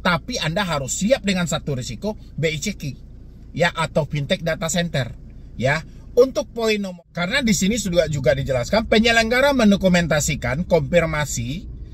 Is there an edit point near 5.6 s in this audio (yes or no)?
no